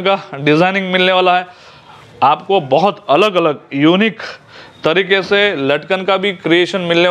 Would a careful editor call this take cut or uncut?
uncut